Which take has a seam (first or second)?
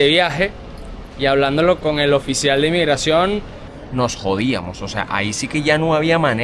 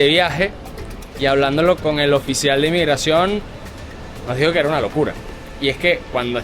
first